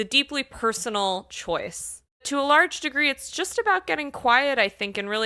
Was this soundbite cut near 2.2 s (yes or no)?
yes